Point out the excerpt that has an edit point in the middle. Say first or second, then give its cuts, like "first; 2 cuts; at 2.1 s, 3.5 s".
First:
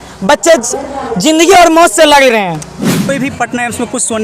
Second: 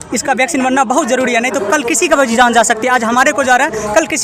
first; 1 cut; at 3.0 s